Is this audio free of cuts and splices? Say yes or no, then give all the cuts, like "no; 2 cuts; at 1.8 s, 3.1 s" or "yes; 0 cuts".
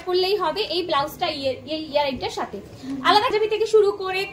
no; 1 cut; at 3.3 s